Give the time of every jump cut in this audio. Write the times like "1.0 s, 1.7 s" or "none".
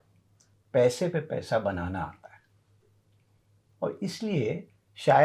none